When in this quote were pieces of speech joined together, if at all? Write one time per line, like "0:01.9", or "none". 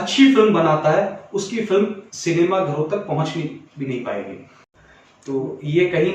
none

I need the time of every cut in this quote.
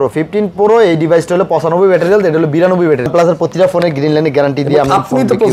0:03.1

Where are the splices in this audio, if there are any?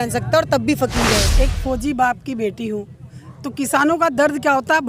0:01.3

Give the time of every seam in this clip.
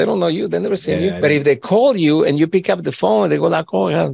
0:01.2

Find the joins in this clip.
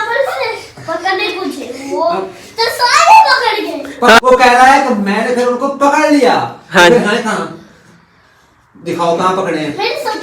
0:04.2

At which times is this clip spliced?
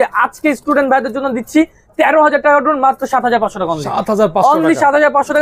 none

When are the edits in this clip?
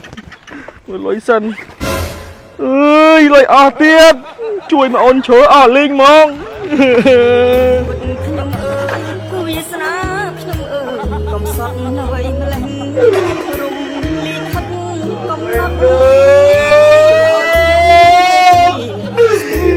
none

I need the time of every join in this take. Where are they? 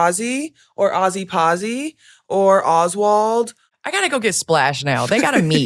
none

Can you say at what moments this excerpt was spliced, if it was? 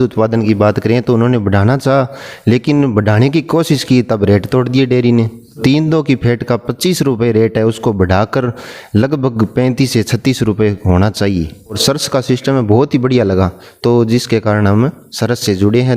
0:05.6
0:11.7

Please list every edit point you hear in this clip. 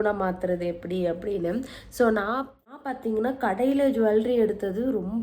0:02.5

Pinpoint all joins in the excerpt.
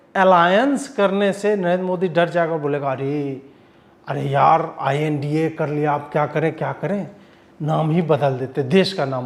none

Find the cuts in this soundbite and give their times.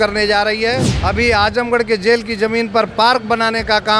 0:00.9

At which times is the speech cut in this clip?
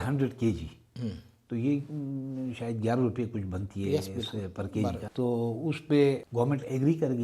0:05.0
0:06.2

